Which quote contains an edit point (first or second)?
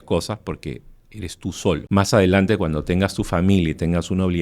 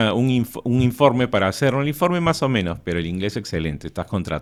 first